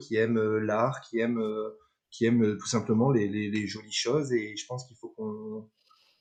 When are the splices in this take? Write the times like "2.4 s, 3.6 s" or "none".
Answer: none